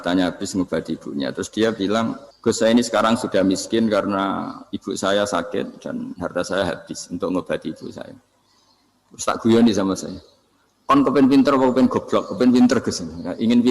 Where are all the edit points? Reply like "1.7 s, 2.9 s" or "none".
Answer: 2.3 s